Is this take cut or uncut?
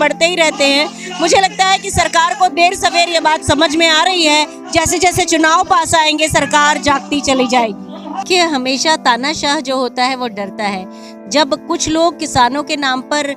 cut